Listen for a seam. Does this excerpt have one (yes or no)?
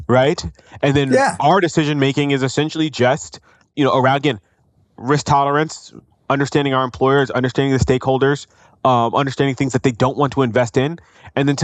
yes